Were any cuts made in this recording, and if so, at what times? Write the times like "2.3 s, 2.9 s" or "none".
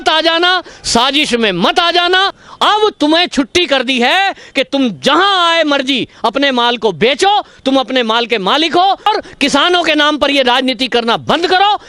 2.4 s, 9.1 s